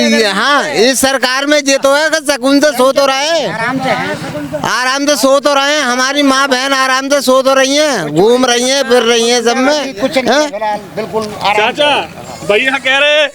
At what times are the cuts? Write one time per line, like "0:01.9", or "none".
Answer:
none